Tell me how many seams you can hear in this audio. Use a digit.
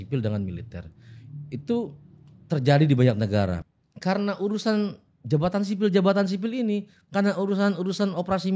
1